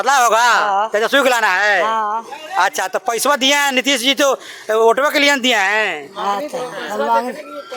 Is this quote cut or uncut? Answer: uncut